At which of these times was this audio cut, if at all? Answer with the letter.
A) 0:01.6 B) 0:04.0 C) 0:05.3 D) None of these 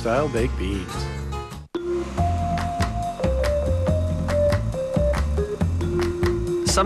A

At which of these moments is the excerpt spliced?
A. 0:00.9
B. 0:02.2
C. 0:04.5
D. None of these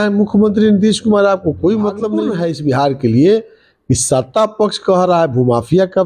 B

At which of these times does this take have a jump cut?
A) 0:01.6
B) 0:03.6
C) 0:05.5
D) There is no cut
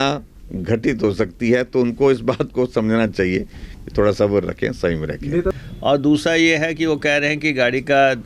C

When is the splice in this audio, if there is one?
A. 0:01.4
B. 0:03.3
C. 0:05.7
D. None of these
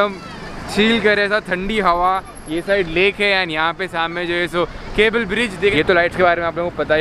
C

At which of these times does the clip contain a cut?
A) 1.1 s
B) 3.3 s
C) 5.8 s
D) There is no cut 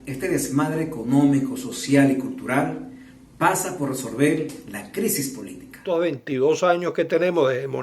C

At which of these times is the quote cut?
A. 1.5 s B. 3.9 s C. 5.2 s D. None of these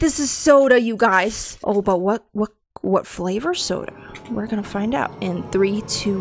A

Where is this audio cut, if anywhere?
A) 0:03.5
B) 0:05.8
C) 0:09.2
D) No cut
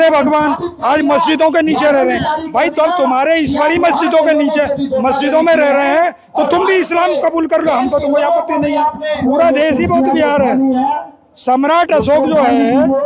C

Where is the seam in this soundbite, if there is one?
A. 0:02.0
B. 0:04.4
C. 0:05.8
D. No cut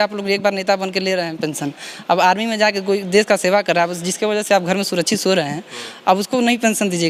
D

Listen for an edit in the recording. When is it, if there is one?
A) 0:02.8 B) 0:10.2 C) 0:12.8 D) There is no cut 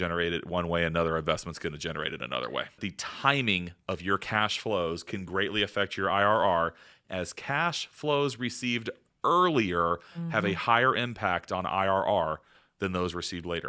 A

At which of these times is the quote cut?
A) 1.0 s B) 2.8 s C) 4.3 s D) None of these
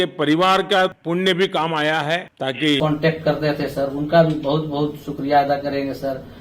B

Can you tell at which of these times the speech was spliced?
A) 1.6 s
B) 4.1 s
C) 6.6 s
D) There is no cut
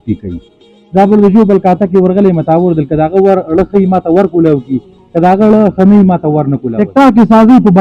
C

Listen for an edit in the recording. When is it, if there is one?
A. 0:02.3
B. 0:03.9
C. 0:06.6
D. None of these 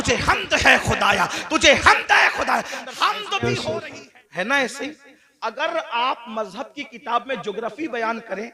B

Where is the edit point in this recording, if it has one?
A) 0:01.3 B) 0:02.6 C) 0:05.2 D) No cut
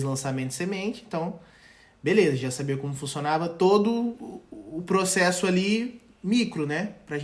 D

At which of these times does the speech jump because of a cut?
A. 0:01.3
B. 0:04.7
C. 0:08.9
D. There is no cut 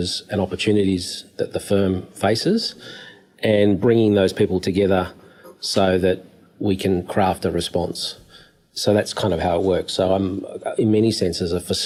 D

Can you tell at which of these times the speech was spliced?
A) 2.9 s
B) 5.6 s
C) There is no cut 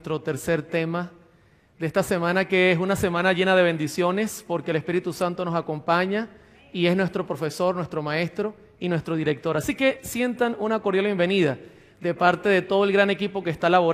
B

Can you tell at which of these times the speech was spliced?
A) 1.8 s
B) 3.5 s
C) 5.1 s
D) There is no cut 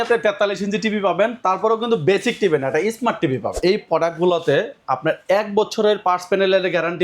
B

